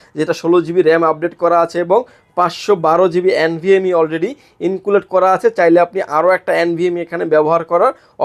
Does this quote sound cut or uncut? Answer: uncut